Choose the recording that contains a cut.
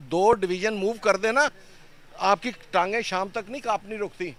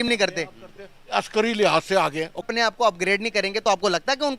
second; 1 cut; at 2.5 s

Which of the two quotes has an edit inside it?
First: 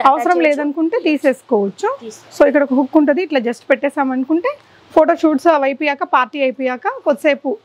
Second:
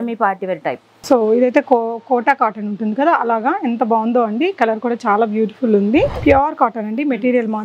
second; 1 cut; at 6.2 s

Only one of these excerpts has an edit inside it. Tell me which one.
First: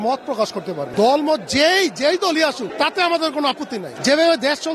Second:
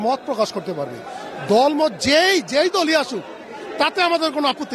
first; 3 cuts; at 0.8 s, 2.6 s, 3.9 s

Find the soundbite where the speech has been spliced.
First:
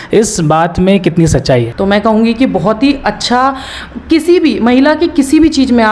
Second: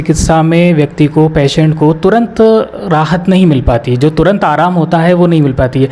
first; 1 cut; at 1.7 s

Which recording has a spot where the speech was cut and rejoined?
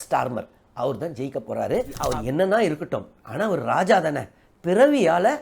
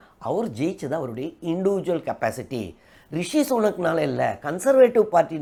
first; 1 cut; at 1.9 s

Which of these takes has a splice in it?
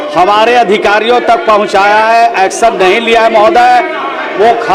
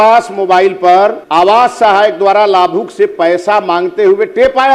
second; 1 cut; at 1.2 s

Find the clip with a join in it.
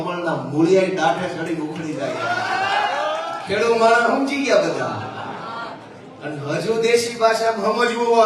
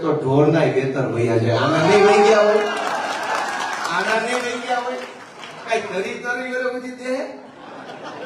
first; 1 cut; at 3.2 s

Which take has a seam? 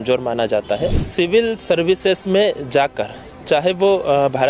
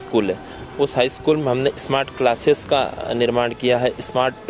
first; 1 cut; at 1.0 s

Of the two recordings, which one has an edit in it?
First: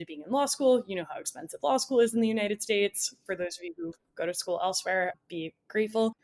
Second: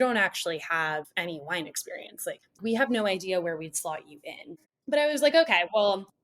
second; 3 cuts; at 1.1 s, 2.6 s, 4.6 s

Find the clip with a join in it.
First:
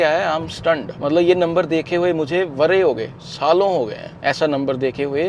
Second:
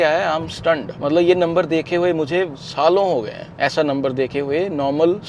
second; 1 cut; at 2.5 s

